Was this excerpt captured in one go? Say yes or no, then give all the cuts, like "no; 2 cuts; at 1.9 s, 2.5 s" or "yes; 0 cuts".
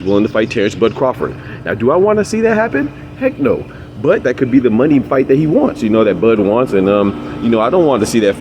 yes; 0 cuts